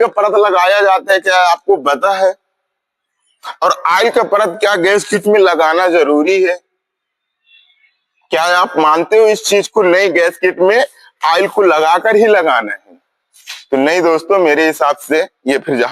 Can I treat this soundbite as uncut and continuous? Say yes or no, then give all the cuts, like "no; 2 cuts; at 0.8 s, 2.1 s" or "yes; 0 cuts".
yes; 0 cuts